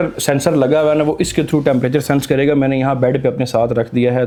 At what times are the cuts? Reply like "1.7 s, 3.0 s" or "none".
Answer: none